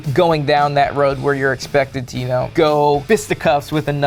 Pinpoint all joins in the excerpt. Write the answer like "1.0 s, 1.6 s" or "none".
none